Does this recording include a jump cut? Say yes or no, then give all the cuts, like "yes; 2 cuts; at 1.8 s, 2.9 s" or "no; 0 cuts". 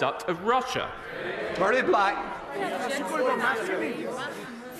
yes; 1 cut; at 1.3 s